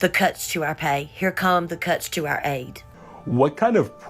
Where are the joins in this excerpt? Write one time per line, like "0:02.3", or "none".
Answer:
0:02.9